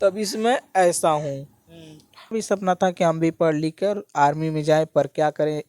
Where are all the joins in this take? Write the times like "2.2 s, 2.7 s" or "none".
2.3 s